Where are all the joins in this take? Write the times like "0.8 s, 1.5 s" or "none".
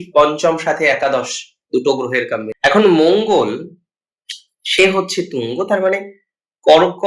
2.5 s